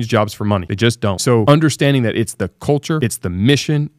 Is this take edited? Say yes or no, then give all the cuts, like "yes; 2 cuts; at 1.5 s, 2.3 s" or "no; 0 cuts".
yes; 2 cuts; at 1.3 s, 3.0 s